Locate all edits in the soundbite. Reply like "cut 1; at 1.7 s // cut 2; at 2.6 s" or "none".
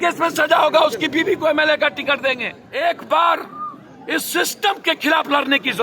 cut 1; at 2.6 s

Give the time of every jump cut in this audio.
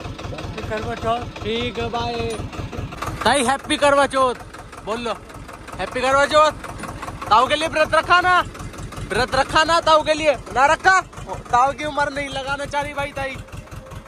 cut 1; at 3.2 s

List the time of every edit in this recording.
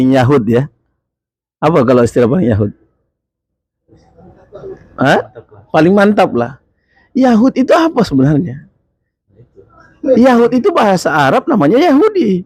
none

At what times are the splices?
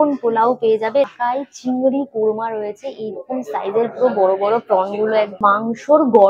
cut 1; at 1.0 s // cut 2; at 5.4 s

